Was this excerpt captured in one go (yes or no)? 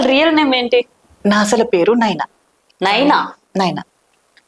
no